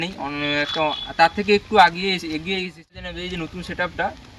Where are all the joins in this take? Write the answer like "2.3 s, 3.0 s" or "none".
3.1 s